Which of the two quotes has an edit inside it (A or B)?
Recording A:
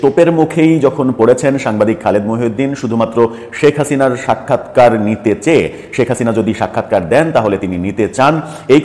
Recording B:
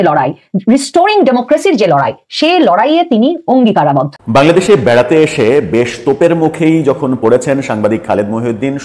B